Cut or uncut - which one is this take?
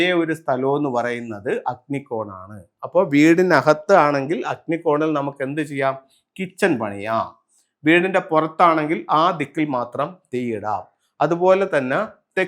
uncut